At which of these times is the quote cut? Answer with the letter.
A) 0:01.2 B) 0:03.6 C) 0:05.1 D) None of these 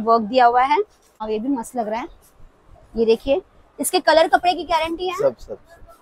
A